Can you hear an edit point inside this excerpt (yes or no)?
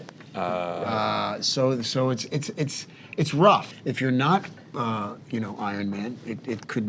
yes